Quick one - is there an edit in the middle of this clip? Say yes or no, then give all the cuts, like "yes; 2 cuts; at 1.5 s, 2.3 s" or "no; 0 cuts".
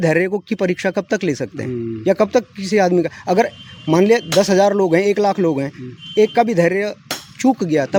no; 0 cuts